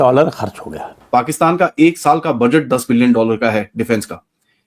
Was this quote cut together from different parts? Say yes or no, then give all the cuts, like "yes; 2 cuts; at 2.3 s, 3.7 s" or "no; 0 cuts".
yes; 1 cut; at 0.9 s